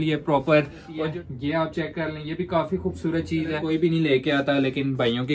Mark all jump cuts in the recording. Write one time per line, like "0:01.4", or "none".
0:00.9
0:03.6